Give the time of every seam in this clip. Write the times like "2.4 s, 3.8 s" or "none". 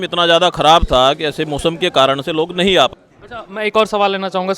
2.9 s

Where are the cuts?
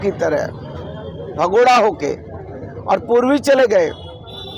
none

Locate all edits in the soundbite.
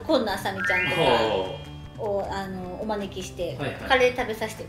none

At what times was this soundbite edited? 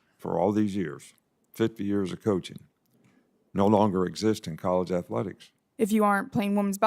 5.7 s

